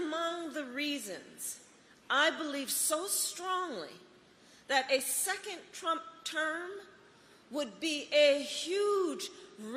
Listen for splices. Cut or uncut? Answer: uncut